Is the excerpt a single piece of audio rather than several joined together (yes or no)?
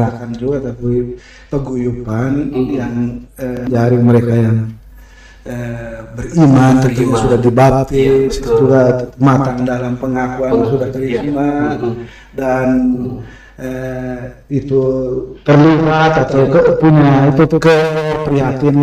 no